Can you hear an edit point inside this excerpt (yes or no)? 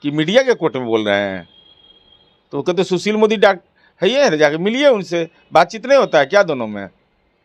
no